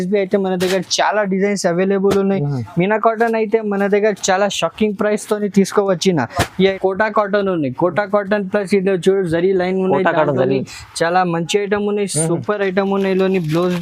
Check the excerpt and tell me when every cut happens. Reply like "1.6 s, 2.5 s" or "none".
6.6 s